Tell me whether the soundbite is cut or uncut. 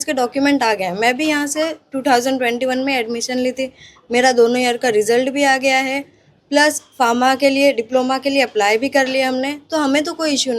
uncut